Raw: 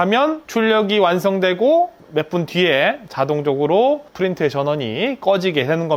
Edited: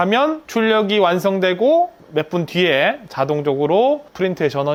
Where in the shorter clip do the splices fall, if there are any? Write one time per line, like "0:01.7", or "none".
none